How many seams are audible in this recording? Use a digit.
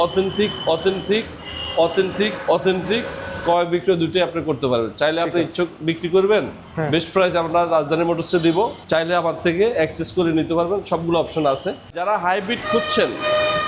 3